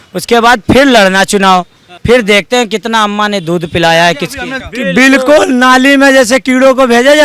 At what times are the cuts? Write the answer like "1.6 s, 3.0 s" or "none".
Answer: 1.9 s, 4.5 s